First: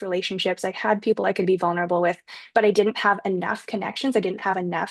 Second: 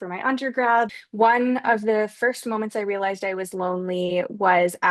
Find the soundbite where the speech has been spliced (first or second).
second